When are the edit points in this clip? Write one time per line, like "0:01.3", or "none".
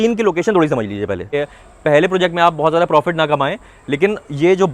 0:01.3